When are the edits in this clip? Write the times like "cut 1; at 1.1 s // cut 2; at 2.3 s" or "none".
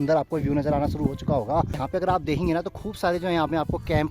cut 1; at 1.8 s